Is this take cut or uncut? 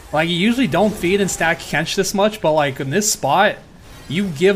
uncut